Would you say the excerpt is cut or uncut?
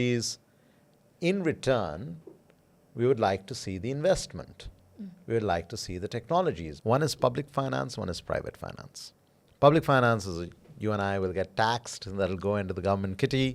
cut